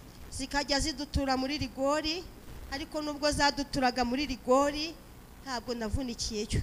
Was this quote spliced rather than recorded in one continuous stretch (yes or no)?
no